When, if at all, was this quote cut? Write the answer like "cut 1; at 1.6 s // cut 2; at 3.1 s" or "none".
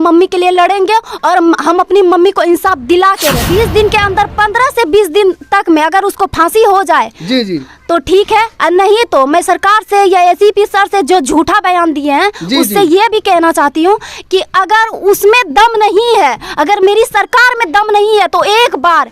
cut 1; at 3.4 s